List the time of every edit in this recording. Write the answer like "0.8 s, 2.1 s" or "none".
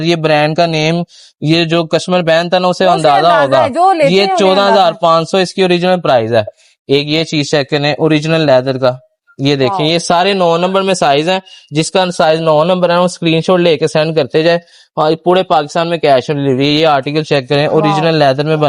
none